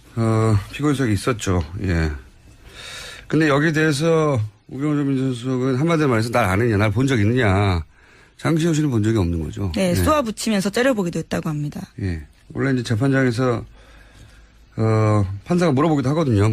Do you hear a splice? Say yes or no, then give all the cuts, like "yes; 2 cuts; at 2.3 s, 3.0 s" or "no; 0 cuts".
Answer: yes; 1 cut; at 1.4 s